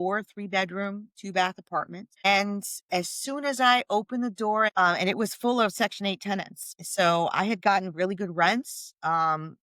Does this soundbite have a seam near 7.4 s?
no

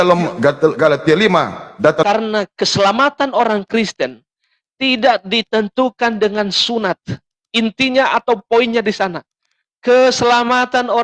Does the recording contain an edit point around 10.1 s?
no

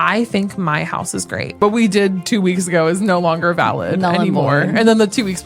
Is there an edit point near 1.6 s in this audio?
yes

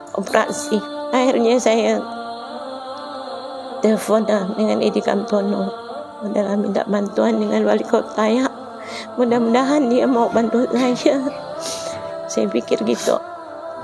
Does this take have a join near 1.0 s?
yes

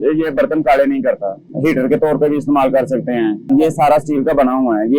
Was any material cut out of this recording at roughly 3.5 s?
yes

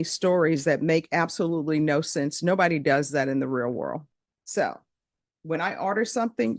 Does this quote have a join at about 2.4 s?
no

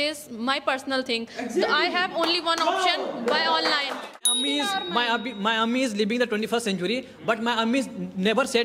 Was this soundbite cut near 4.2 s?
yes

